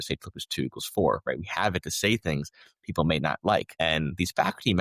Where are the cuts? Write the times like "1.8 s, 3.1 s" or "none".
3.7 s